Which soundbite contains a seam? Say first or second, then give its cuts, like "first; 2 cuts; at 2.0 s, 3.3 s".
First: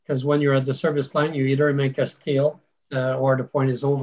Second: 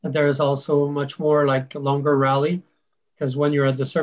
first; 1 cut; at 2.8 s